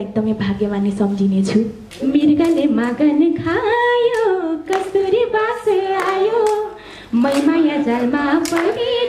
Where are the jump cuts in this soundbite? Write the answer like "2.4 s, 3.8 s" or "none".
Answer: 1.8 s